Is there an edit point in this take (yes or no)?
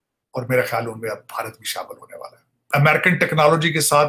yes